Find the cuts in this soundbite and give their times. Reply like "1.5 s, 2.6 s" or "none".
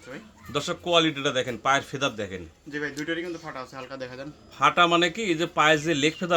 none